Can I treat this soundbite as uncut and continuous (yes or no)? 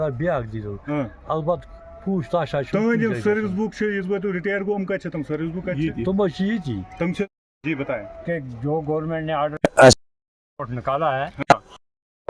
no